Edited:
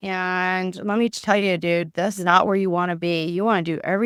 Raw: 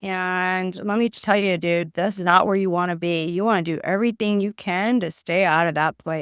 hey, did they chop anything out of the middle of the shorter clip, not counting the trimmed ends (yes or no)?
no